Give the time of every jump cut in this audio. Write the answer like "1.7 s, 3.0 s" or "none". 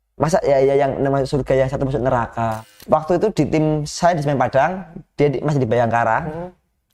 2.7 s